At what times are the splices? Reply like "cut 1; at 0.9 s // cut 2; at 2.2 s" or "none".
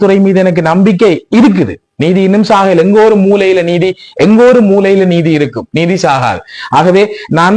none